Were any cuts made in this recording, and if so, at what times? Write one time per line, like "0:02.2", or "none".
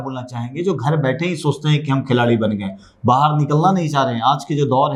none